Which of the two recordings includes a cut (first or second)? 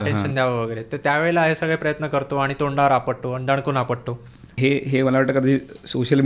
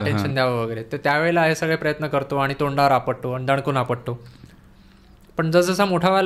first